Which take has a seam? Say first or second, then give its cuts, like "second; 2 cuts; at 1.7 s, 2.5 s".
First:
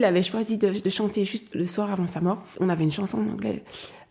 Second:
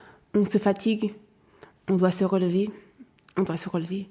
first; 2 cuts; at 1.5 s, 2.5 s